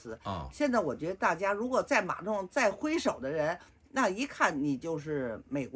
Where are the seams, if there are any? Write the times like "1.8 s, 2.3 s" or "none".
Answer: none